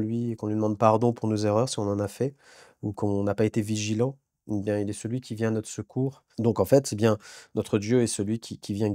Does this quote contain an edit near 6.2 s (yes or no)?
yes